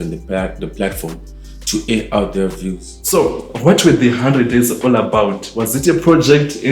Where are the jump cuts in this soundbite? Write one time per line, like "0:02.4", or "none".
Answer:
0:02.9